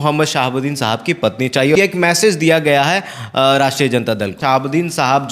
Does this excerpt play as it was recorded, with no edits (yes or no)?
no